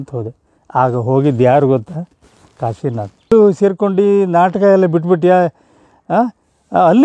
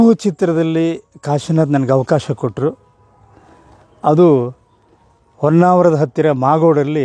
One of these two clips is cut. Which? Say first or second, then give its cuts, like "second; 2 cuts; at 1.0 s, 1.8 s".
first; 1 cut; at 3.3 s